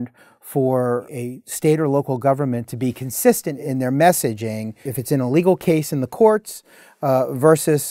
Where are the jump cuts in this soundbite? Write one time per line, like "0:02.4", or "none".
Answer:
0:01.1
0:03.5
0:04.9

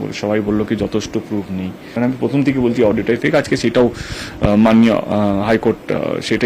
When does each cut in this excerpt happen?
none

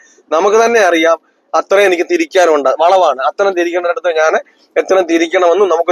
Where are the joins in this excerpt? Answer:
none

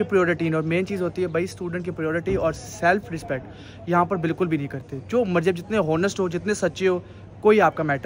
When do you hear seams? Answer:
none

